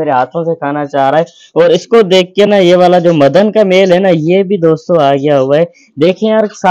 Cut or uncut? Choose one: uncut